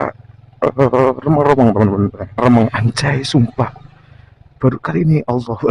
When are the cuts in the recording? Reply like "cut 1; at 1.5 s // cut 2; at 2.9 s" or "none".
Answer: cut 1; at 2.4 s